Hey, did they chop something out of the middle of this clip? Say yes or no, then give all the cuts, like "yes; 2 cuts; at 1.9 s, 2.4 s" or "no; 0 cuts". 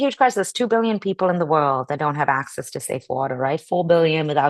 no; 0 cuts